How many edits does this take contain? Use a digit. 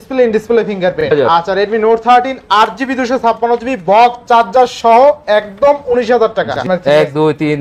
2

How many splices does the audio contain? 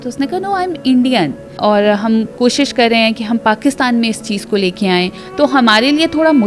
2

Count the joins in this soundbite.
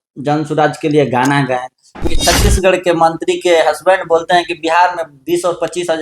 1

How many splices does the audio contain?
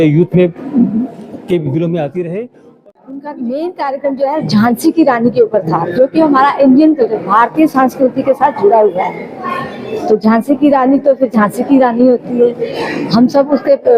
1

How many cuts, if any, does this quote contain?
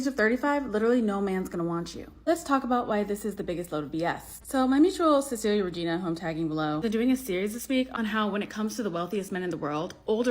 1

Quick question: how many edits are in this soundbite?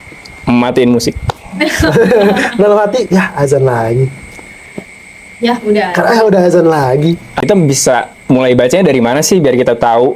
1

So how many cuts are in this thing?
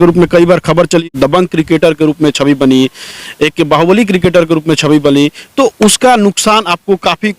1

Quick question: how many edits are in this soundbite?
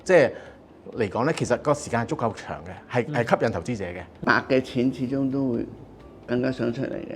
1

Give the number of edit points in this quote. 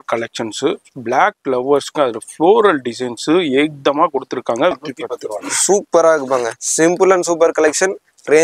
1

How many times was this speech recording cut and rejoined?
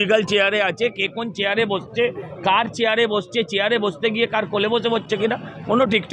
0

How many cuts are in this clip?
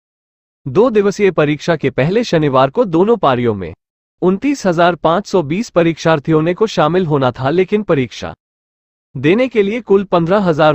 1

